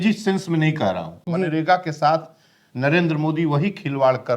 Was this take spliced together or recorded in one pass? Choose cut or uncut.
cut